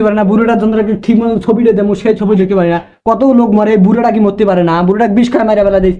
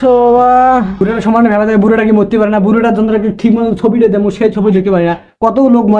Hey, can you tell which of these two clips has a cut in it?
second; 1 cut; at 1.0 s

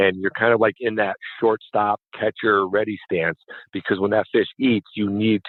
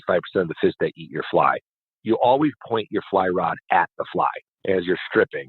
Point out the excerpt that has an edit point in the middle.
second; 2 cuts; at 2.0 s, 4.5 s

